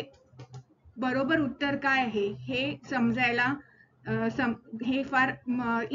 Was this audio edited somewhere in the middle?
no; 0 cuts

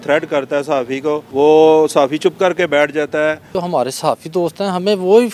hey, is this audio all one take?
no; 2 cuts; at 1.2 s, 3.5 s

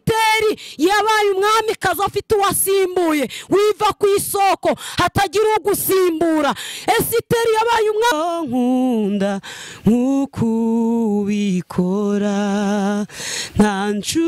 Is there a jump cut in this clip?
yes; 1 cut; at 8.1 s

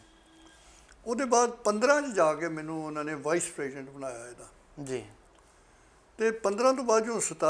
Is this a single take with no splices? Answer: yes; 0 cuts

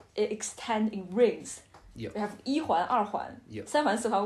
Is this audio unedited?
yes; 0 cuts

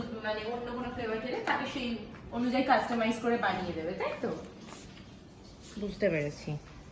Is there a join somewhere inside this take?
no; 0 cuts

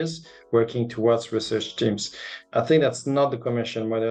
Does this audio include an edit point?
no; 0 cuts

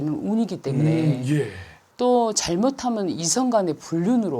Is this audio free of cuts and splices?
no; 1 cut; at 1.8 s

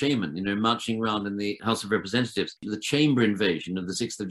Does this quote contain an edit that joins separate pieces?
yes; 2 cuts; at 1.6 s, 2.7 s

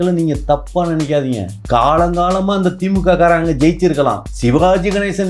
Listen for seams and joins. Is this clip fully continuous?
no; 2 cuts; at 1.5 s, 4.3 s

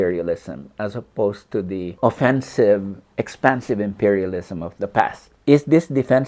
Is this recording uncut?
no; 2 cuts; at 1.9 s, 5.3 s

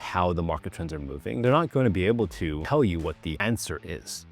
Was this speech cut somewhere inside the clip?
yes; 3 cuts; at 1.4 s, 2.6 s, 3.4 s

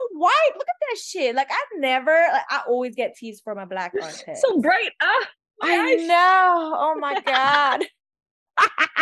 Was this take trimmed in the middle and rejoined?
no; 0 cuts

